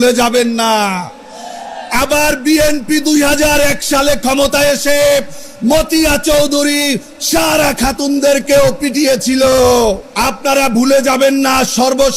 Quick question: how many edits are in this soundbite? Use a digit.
1